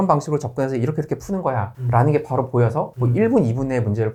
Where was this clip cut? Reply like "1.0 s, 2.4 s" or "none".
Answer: none